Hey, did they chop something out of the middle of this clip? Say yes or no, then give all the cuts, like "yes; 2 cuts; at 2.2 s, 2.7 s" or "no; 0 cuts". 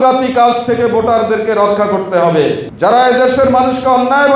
yes; 1 cut; at 2.7 s